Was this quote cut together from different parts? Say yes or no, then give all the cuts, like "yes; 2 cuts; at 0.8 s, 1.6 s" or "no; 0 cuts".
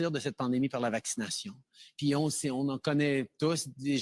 yes; 1 cut; at 1.4 s